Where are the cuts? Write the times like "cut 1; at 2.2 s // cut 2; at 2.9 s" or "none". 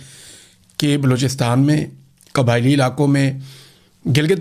none